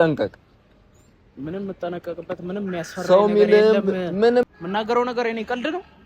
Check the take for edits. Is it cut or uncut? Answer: cut